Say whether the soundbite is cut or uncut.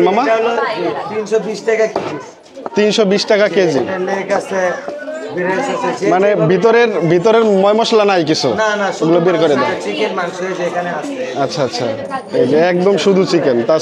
uncut